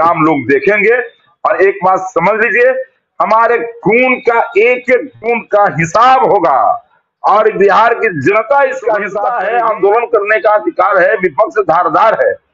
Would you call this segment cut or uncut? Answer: cut